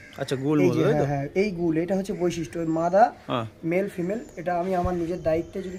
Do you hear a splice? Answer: no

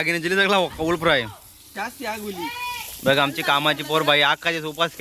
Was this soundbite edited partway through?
no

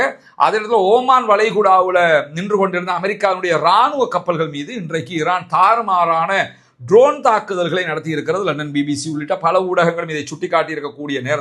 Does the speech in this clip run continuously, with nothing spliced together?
yes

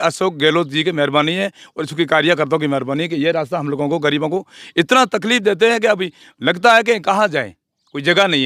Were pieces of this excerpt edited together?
no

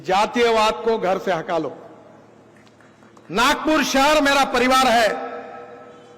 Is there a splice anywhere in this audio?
no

